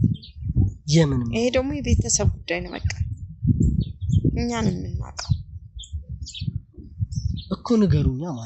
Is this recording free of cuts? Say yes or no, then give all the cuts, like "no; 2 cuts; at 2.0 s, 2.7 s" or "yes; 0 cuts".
yes; 0 cuts